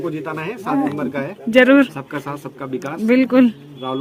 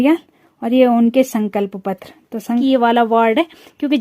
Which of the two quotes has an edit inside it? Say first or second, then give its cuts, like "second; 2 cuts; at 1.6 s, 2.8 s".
second; 1 cut; at 2.6 s